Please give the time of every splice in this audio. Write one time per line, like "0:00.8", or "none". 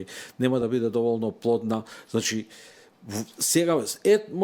none